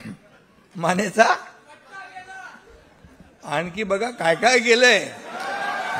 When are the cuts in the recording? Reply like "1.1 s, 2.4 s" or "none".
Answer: none